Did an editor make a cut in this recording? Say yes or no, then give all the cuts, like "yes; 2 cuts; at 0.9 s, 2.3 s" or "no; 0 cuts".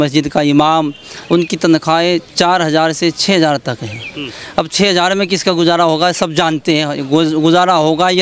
no; 0 cuts